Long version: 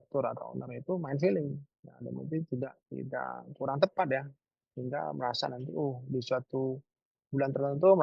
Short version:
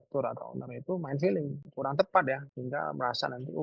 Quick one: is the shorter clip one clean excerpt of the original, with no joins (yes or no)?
no